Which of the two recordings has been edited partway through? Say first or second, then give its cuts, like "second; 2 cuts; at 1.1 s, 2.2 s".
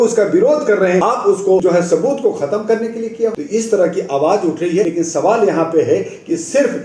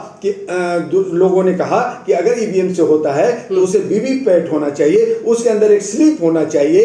first; 3 cuts; at 1.2 s, 3.3 s, 4.9 s